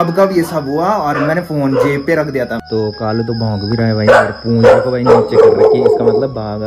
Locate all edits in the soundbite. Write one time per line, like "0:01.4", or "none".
0:02.6